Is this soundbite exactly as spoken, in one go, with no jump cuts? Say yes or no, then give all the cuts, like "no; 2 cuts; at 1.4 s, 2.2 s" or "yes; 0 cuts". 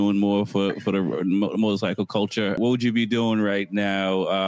no; 1 cut; at 2.6 s